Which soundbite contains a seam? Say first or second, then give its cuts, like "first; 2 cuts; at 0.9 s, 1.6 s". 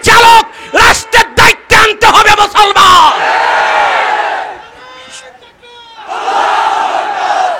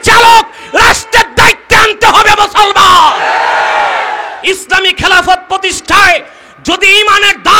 second; 1 cut; at 4.3 s